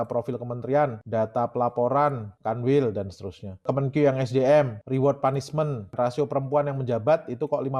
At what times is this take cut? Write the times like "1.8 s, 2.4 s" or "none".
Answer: 1.0 s, 2.3 s, 3.7 s, 4.8 s, 5.9 s

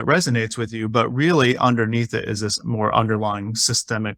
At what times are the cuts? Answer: none

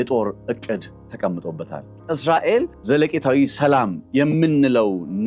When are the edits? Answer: 1.9 s, 2.8 s

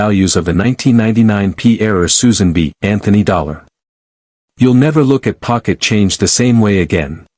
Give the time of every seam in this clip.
none

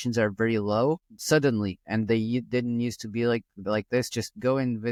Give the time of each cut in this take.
none

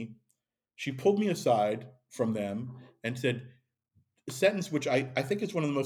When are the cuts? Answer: none

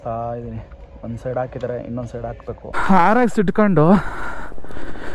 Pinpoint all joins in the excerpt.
2.7 s

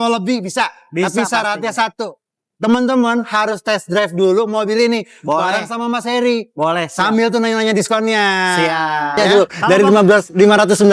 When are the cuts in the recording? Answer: 9.2 s

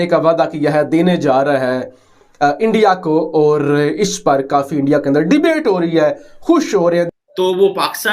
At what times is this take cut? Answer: 7.1 s

